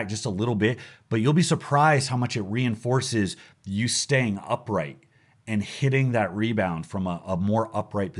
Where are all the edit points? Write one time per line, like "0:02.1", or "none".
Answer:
none